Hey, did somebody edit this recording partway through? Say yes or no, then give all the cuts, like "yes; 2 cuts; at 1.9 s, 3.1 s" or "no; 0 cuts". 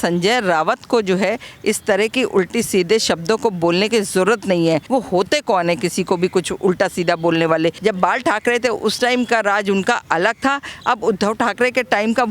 yes; 2 cuts; at 4.8 s, 7.8 s